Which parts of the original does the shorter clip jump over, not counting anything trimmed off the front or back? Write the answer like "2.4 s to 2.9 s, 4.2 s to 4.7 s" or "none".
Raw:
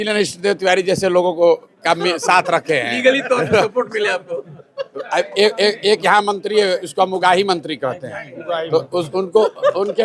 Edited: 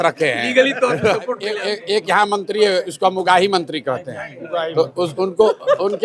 4.2 s to 5.6 s